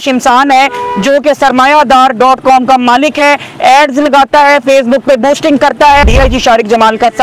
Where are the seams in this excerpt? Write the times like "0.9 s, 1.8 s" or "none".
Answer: 6.1 s